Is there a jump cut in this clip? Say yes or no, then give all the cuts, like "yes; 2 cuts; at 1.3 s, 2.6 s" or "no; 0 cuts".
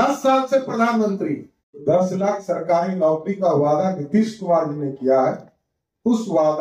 yes; 1 cut; at 1.8 s